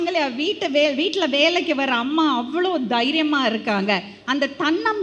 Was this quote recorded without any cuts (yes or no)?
yes